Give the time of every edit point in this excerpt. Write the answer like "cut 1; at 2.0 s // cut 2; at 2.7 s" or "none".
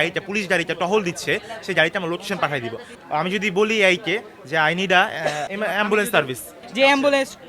cut 1; at 2.9 s // cut 2; at 5.5 s // cut 3; at 6.6 s